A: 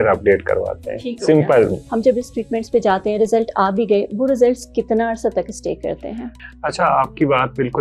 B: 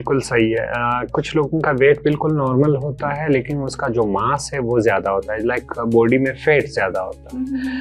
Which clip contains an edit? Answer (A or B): A